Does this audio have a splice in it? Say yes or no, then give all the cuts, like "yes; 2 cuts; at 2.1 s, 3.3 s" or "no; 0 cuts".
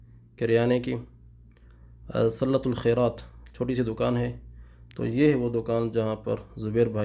no; 0 cuts